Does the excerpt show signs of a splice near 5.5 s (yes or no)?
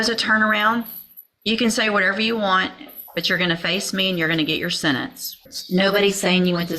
yes